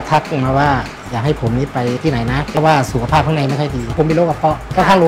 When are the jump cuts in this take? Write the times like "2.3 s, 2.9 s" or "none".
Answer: 2.5 s, 3.9 s